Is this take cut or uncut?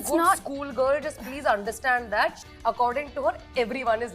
cut